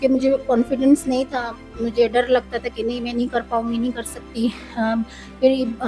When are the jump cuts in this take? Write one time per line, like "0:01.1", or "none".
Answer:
none